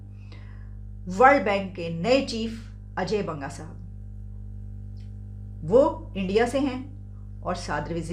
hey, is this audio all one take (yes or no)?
yes